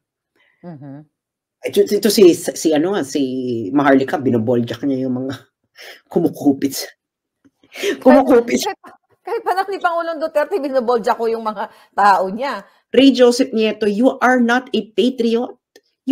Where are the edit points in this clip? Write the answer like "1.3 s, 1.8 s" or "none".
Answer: 12.7 s